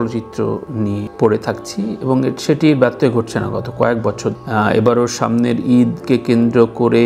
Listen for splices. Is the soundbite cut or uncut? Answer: uncut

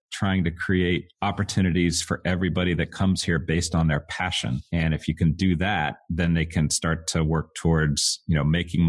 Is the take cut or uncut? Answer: cut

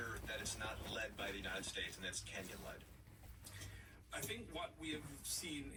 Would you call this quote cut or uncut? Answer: uncut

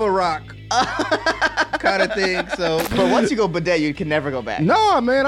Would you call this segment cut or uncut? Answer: cut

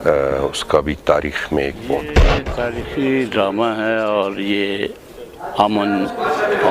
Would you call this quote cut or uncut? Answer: cut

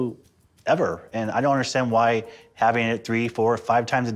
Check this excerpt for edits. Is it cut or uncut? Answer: uncut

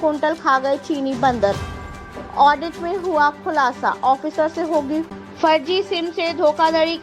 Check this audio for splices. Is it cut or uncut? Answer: cut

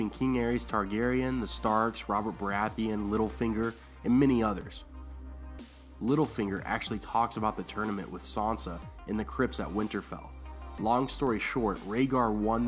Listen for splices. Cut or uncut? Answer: uncut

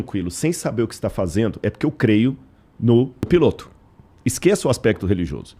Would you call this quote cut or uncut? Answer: cut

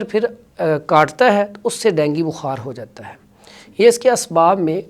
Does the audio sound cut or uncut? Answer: uncut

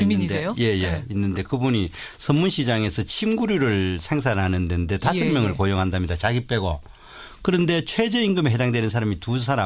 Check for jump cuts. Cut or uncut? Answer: uncut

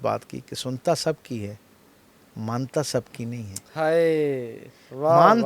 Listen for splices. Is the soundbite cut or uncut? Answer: uncut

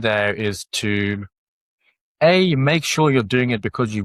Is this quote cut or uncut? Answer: uncut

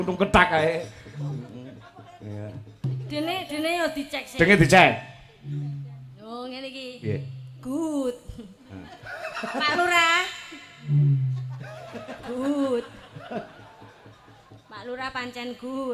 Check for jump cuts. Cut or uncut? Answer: uncut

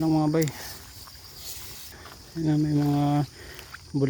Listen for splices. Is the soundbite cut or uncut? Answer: cut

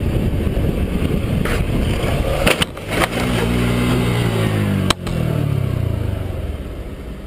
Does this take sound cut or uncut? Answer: uncut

